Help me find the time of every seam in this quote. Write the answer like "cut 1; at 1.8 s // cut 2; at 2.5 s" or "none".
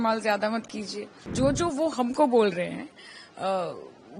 cut 1; at 1.2 s